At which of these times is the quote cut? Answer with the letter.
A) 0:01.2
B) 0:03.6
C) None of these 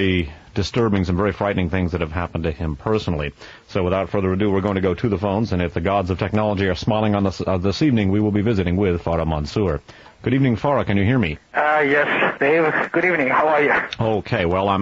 A